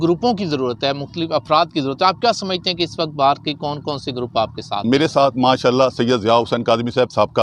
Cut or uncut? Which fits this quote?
uncut